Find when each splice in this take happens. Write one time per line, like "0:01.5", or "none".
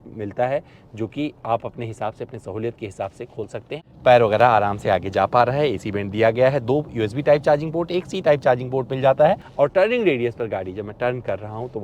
0:03.8
0:09.5